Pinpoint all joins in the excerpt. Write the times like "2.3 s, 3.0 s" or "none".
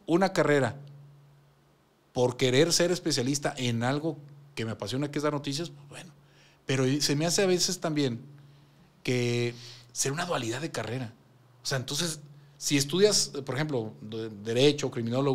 none